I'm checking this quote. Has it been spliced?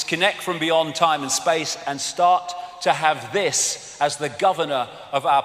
no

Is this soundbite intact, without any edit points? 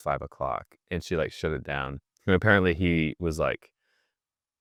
yes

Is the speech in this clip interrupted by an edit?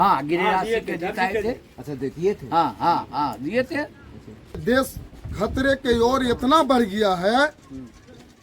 yes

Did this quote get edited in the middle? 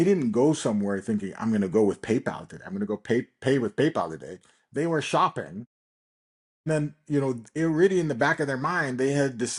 no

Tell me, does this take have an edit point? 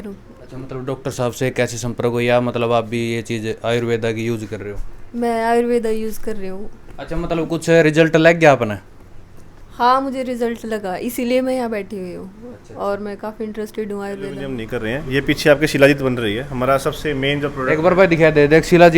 yes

